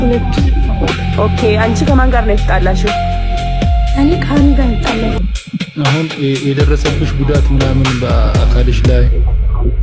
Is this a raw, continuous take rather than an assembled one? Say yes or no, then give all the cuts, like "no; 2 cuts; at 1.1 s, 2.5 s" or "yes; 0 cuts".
no; 1 cut; at 5.2 s